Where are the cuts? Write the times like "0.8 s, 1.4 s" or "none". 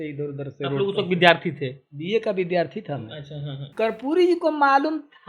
3.6 s